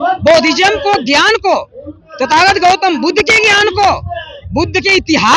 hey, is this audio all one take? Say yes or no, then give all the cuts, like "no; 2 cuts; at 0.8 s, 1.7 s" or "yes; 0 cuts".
yes; 0 cuts